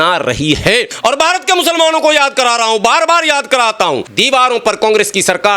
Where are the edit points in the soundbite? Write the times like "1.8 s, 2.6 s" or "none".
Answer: 0.9 s, 4.1 s